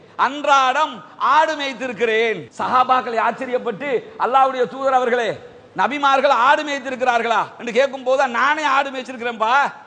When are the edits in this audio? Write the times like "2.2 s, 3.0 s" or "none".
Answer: none